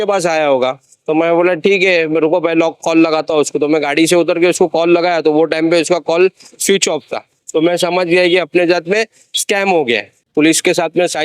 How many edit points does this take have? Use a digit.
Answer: 1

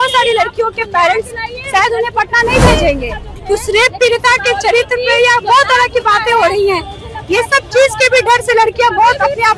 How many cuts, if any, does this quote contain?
1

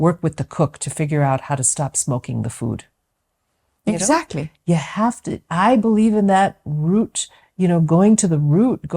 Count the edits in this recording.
0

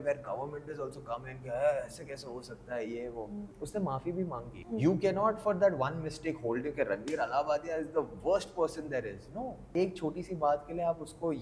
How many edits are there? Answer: 3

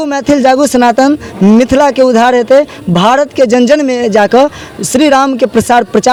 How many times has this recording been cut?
0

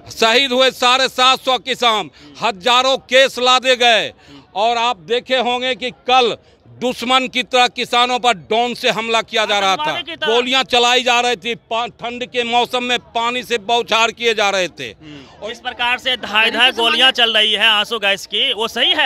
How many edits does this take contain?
2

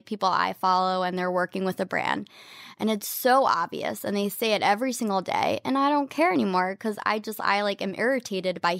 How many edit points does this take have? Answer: 0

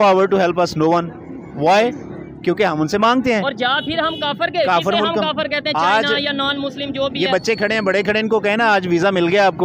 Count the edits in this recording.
0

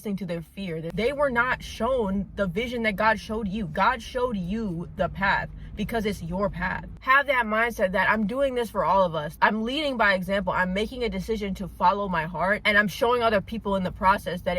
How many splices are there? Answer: 3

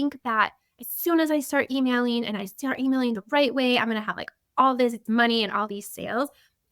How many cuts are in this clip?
1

